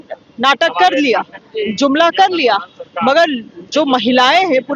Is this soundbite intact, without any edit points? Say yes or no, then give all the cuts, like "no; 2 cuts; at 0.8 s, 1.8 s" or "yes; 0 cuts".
yes; 0 cuts